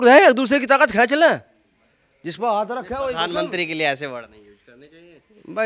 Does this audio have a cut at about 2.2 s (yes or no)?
no